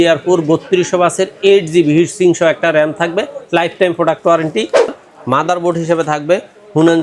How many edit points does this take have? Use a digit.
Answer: 1